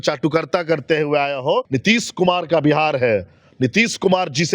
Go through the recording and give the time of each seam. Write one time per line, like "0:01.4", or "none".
0:01.7